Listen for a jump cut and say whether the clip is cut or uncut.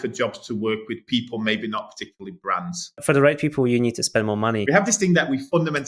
cut